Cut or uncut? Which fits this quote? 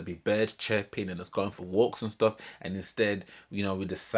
uncut